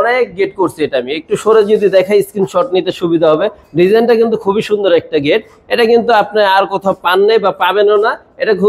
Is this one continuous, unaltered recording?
yes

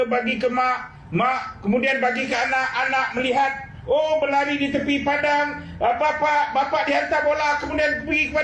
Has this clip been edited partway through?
no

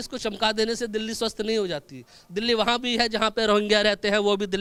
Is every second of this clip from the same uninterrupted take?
yes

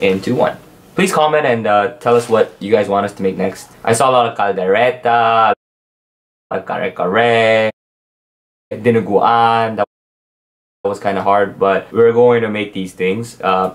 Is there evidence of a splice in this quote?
yes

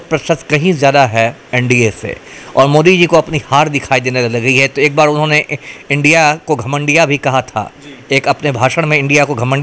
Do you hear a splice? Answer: no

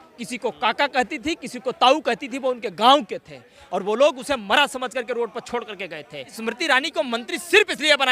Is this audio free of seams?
no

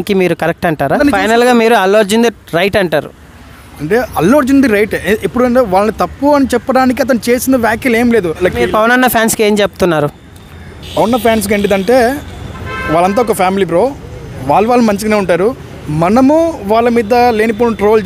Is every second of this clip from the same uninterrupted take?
no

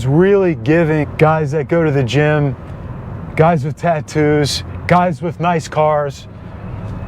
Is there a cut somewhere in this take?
yes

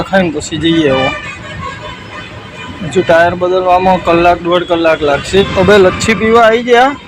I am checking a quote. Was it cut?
yes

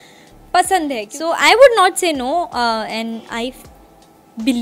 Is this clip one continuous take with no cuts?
no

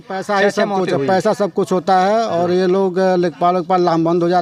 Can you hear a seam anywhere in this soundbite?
no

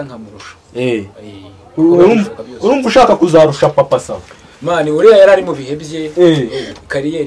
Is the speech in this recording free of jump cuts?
yes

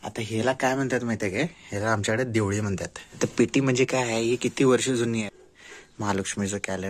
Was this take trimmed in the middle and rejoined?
yes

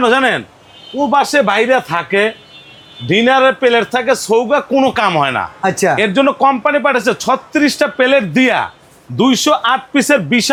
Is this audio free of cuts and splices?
yes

